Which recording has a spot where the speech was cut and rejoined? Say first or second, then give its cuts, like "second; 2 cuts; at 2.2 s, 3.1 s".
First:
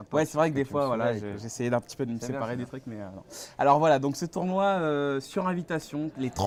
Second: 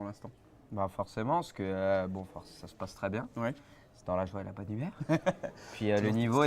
second; 1 cut; at 5.0 s